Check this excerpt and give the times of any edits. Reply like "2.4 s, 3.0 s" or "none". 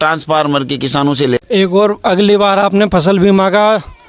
1.4 s